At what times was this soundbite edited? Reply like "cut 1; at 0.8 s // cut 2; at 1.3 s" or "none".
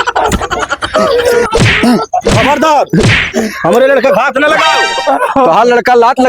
cut 1; at 0.9 s